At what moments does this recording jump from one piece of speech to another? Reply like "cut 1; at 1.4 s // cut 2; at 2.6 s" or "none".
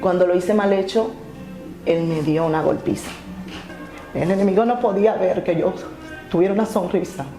cut 1; at 3.7 s